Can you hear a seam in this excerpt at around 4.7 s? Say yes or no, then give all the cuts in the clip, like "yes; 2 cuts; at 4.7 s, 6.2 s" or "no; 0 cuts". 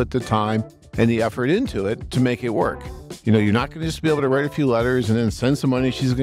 no; 2 cuts; at 2.0 s, 3.1 s